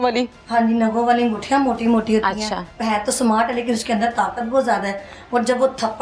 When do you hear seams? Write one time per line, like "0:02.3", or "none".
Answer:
0:02.7